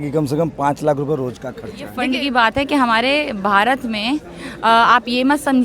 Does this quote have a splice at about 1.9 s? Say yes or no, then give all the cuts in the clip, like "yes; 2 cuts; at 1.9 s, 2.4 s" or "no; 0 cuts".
yes; 1 cut; at 1.9 s